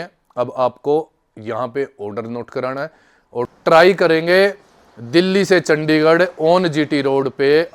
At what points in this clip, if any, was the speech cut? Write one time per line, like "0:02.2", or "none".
0:03.5